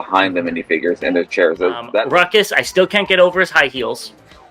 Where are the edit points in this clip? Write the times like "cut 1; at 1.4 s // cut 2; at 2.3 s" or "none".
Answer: cut 1; at 1.9 s